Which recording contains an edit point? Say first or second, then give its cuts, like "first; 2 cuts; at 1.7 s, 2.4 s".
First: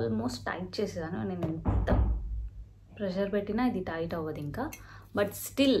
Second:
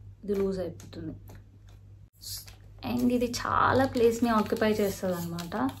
second; 1 cut; at 2.1 s